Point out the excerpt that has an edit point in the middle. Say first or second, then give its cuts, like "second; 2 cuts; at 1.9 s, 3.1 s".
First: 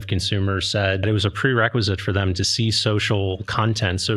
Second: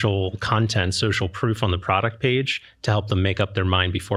first; 1 cut; at 1.0 s